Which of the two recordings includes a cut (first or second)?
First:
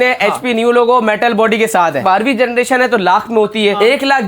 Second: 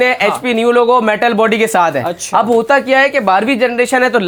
first